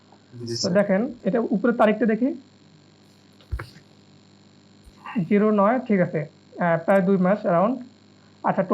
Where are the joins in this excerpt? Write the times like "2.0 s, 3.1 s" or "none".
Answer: 1.1 s